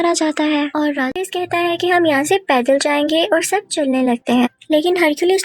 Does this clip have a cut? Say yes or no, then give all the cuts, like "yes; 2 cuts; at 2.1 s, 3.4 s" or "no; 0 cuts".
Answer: yes; 1 cut; at 1.1 s